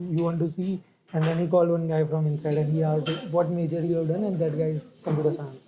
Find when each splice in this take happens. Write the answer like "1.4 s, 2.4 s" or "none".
none